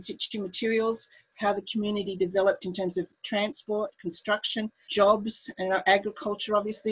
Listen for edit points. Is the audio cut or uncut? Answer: cut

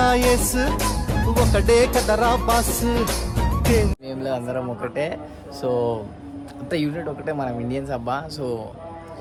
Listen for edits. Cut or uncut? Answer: uncut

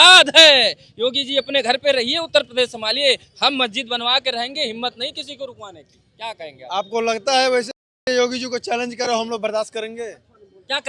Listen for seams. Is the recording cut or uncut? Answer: uncut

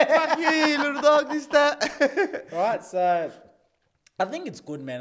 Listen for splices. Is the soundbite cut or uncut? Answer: uncut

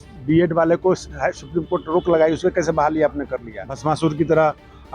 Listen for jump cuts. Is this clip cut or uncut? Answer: cut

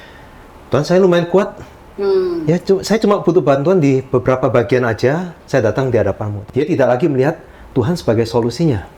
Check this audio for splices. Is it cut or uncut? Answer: cut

